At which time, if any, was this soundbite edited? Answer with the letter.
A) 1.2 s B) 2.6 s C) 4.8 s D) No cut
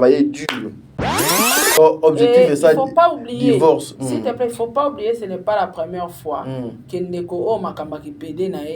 A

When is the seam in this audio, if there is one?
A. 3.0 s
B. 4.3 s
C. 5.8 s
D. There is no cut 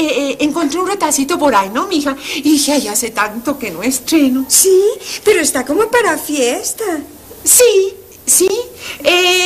B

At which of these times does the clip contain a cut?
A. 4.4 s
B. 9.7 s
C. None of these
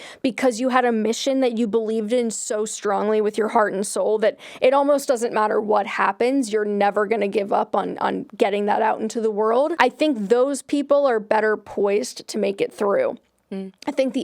B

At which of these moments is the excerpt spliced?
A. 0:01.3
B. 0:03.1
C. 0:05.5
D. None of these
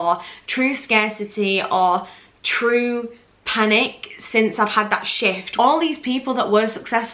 C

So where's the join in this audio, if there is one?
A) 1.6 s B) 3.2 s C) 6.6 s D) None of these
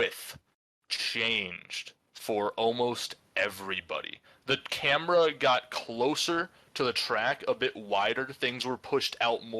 D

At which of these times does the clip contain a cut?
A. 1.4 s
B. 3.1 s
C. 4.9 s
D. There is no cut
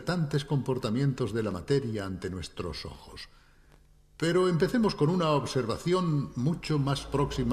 C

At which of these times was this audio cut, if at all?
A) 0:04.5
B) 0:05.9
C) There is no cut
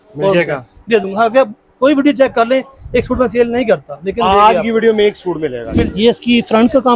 B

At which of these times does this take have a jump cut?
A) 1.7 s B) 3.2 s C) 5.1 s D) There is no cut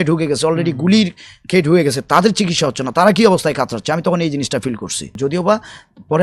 C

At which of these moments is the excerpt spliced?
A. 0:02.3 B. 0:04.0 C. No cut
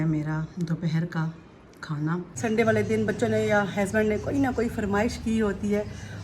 A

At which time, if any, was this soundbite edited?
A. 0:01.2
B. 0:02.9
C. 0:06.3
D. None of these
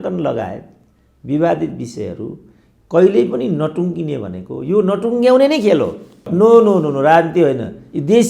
C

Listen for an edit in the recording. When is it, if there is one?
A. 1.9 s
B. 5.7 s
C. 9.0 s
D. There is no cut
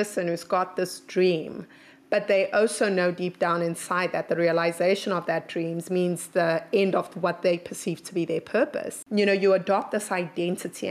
C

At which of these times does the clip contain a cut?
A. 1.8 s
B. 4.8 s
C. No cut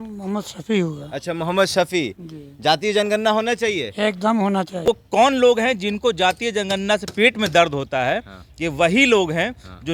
B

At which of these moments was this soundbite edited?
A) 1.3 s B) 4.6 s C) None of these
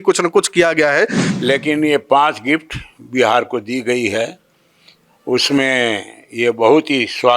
A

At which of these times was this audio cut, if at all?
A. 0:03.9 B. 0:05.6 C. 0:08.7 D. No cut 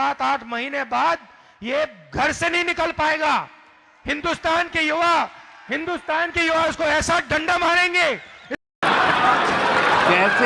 C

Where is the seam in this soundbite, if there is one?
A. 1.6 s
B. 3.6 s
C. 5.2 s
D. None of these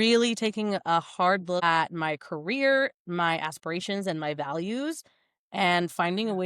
A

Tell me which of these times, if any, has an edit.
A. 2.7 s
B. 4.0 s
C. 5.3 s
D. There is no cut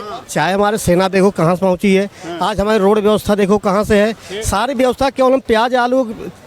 D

